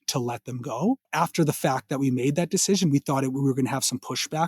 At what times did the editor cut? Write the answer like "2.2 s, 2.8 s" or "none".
1.1 s